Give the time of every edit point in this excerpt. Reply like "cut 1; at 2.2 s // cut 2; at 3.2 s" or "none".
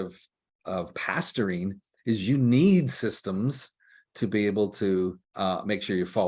cut 1; at 5.2 s